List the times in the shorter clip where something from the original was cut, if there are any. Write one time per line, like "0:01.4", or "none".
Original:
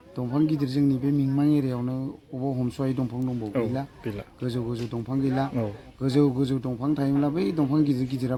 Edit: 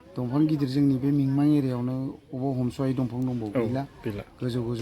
none